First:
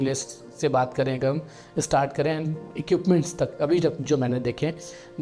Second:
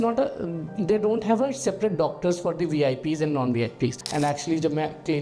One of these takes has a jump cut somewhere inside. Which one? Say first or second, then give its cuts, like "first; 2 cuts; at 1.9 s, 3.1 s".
second; 1 cut; at 4.0 s